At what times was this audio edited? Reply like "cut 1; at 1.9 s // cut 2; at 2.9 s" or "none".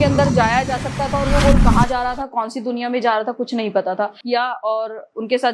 cut 1; at 4.2 s